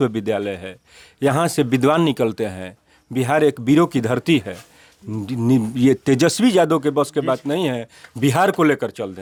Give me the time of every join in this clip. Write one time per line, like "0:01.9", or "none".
none